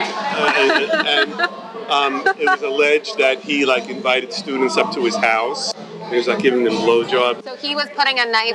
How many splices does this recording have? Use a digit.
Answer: 2